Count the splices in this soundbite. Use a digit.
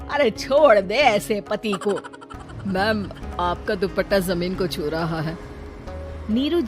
1